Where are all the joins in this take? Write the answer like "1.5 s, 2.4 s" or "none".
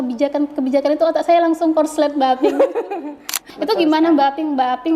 3.5 s